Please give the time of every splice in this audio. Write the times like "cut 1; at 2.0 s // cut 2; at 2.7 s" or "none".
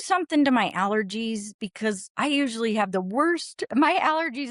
none